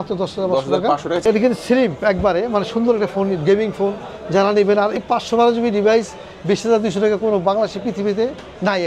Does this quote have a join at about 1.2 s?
yes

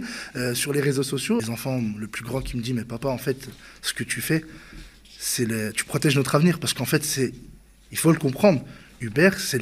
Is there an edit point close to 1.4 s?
yes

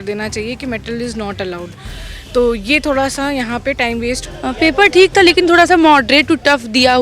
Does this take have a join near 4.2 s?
yes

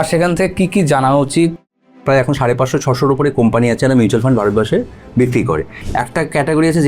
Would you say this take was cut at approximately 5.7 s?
yes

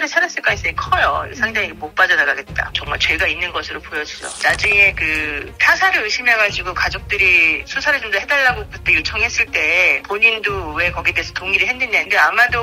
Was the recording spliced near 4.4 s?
yes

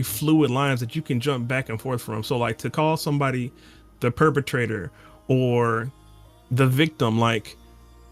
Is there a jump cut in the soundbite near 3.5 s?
no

